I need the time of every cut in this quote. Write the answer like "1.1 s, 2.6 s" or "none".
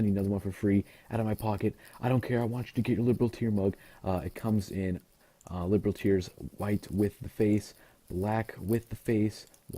8.4 s